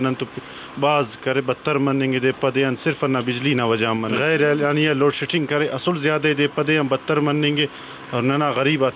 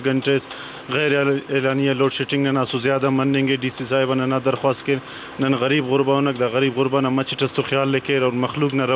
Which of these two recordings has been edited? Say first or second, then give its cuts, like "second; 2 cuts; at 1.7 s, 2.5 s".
first; 1 cut; at 4.1 s